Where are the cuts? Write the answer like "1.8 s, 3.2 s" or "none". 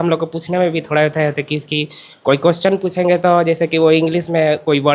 none